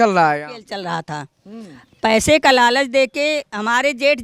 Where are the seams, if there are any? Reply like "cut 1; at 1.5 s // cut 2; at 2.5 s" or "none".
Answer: none